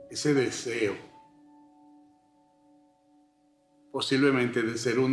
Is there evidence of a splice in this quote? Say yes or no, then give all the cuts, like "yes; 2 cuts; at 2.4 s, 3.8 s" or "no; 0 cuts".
no; 0 cuts